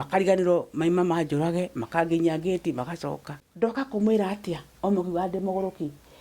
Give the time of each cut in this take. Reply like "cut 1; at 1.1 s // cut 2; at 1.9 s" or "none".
cut 1; at 3.9 s